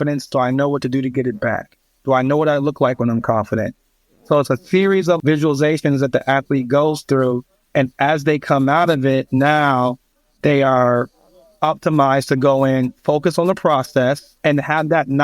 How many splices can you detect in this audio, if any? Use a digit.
2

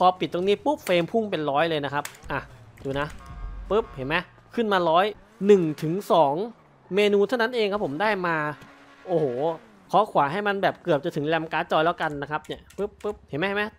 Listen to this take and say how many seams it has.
2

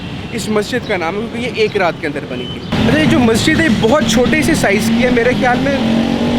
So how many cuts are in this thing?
0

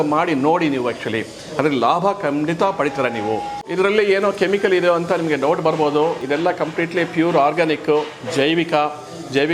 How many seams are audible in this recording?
2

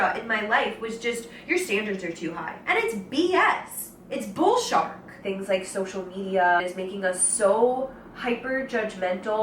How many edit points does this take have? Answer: 3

